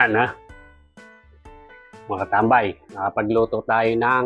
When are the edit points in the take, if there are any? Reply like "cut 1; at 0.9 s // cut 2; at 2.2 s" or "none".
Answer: none